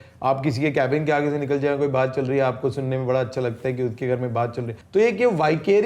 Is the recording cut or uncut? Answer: cut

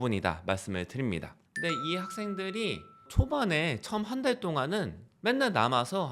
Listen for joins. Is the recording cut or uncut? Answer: cut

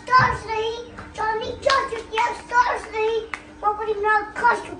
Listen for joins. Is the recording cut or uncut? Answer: uncut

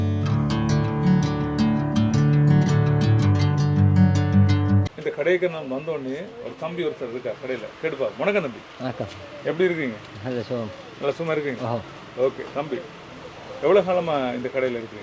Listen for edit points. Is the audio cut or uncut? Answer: uncut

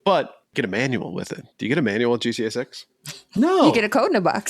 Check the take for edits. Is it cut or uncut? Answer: uncut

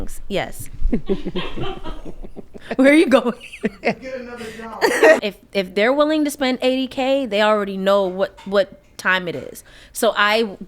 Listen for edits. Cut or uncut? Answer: cut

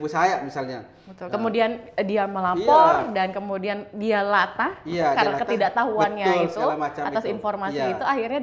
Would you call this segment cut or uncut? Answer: uncut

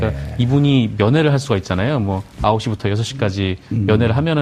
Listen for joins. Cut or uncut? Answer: uncut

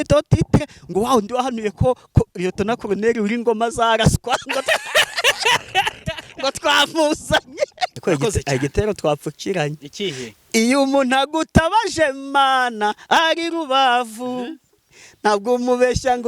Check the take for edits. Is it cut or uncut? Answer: cut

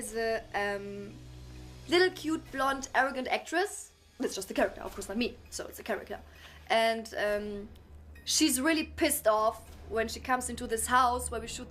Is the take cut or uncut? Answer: cut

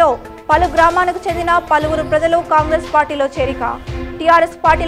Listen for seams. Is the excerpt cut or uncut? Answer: uncut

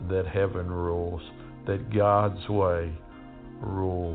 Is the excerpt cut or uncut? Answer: uncut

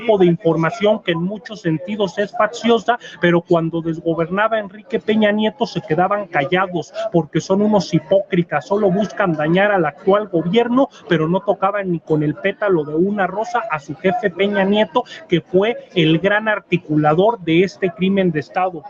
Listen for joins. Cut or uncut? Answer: uncut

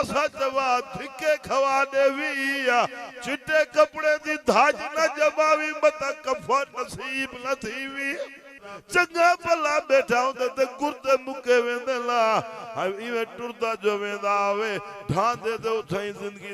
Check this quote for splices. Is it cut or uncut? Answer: cut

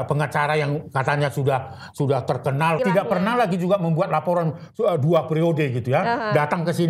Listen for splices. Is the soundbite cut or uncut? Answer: cut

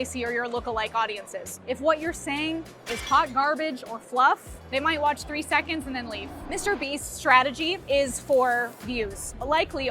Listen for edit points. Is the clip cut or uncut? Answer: cut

